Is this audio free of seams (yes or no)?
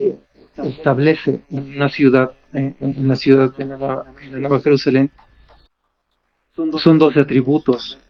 yes